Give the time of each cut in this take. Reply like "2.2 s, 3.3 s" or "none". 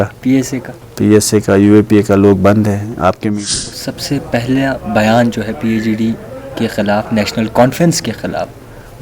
3.3 s